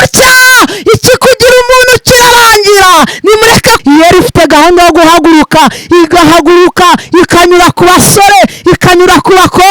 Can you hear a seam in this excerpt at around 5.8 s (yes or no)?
no